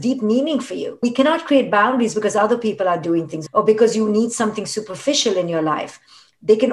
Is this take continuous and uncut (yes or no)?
no